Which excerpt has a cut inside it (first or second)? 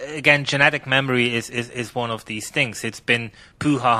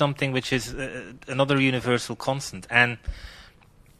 second